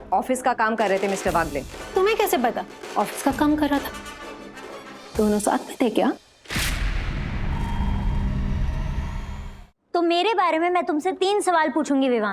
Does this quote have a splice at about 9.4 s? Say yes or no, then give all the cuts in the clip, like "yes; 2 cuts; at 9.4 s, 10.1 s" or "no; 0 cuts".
yes; 2 cuts; at 2.7 s, 9.4 s